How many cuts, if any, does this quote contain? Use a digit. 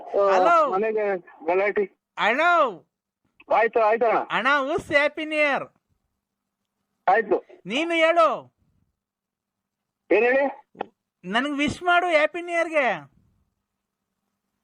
0